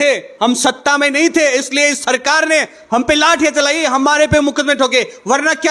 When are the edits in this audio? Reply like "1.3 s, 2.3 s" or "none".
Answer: none